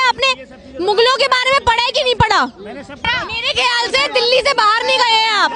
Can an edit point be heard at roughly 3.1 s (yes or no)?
yes